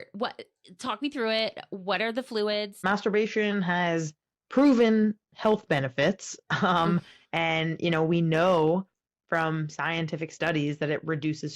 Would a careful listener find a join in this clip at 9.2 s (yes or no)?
no